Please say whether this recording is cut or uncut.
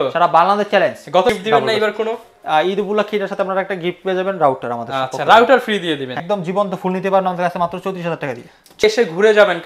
cut